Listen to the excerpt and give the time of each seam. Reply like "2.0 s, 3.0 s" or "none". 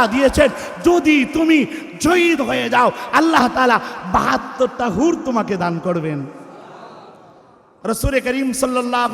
7.7 s

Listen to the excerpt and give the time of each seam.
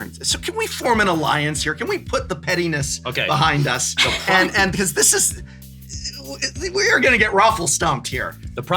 none

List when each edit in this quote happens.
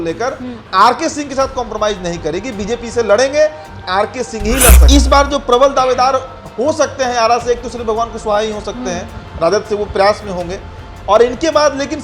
4.8 s

